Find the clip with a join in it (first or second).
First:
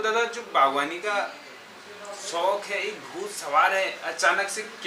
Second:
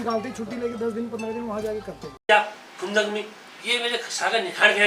second